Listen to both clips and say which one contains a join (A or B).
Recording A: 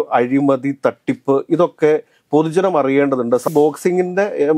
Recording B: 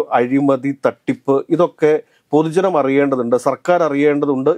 A